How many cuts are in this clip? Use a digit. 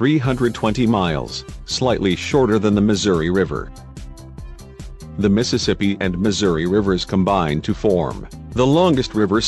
1